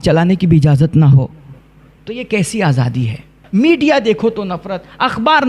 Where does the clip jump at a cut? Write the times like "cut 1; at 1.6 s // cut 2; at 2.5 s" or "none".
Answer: cut 1; at 3.3 s